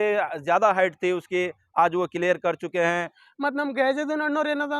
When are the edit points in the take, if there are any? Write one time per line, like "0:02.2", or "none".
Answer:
0:03.2